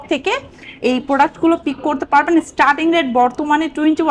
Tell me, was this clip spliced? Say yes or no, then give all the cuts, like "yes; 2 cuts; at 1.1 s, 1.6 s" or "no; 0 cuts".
no; 0 cuts